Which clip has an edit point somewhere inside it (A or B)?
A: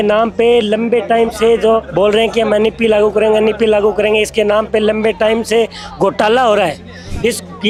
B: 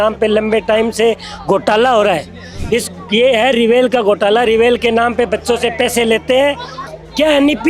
B